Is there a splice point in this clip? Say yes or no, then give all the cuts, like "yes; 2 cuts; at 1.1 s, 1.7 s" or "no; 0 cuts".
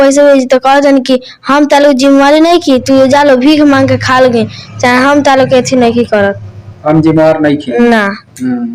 no; 0 cuts